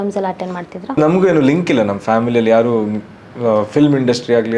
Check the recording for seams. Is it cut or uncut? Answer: cut